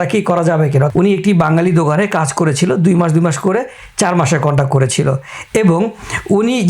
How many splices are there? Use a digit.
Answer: 1